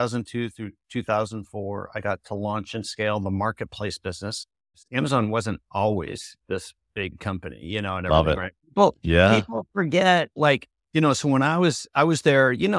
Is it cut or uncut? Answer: cut